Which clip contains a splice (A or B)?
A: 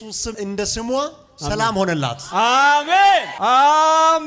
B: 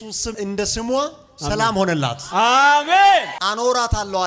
B